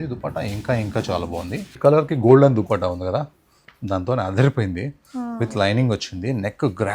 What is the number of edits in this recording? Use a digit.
1